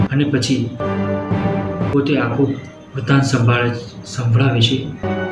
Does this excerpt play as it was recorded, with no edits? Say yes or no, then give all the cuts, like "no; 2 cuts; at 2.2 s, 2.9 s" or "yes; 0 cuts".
yes; 0 cuts